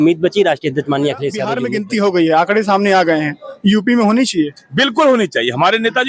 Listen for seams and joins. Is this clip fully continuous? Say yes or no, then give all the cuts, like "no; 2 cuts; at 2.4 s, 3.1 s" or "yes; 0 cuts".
no; 1 cut; at 1.6 s